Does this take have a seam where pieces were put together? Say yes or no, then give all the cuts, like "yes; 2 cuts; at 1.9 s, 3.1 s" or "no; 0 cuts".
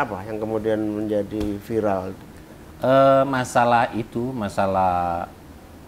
no; 0 cuts